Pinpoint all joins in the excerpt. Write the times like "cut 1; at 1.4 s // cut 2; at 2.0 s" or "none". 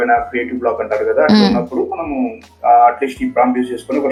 none